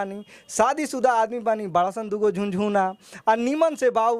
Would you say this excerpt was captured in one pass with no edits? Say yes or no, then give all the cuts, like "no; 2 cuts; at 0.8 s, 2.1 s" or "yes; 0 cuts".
yes; 0 cuts